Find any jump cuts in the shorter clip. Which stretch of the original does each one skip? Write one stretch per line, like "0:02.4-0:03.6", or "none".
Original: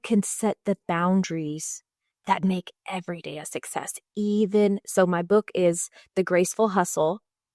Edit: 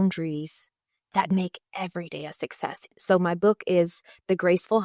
0:04.1-0:04.8